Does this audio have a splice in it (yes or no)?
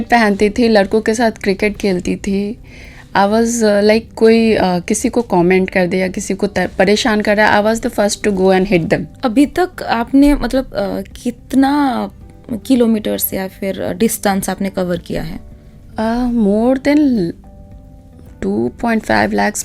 yes